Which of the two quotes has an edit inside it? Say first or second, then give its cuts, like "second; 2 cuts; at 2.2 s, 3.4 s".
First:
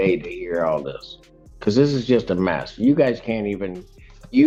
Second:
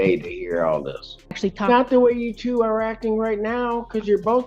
second; 1 cut; at 1.4 s